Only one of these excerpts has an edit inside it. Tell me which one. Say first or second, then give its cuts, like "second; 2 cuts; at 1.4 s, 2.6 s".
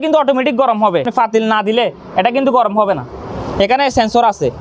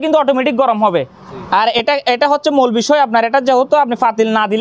first; 1 cut; at 1.1 s